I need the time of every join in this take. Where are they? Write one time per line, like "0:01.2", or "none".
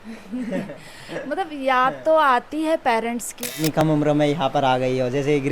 0:03.8

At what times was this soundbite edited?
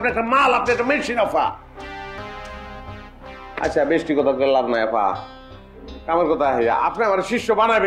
0:02.2

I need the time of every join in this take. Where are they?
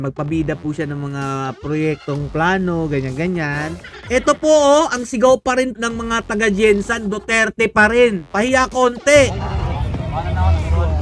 0:03.9
0:05.7

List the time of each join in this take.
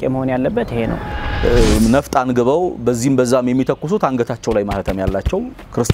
0:01.0

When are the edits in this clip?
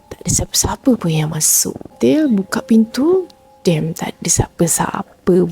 0:01.9

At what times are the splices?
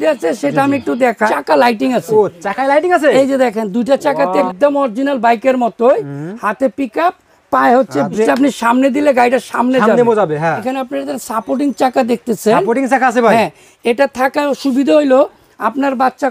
0:01.3
0:04.5
0:08.2
0:10.6

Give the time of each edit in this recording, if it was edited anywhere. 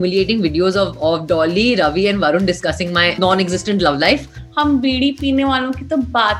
0:03.1
0:04.4

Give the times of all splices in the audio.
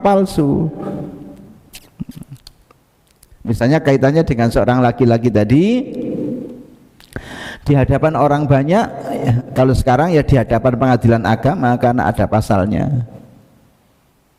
none

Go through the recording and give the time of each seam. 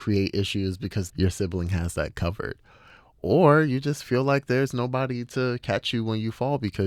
none

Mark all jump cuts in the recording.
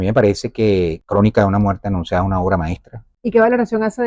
none

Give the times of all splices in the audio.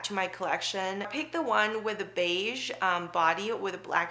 0:01.1

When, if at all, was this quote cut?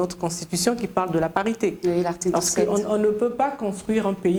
none

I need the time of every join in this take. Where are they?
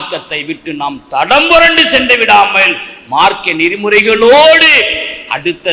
none

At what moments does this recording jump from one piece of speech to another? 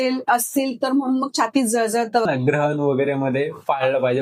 0:02.3

